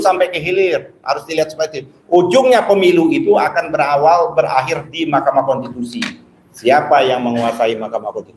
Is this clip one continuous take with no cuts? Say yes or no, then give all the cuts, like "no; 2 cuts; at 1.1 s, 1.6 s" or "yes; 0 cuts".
yes; 0 cuts